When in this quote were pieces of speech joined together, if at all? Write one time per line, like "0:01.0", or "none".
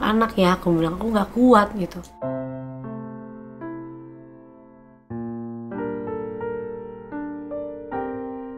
none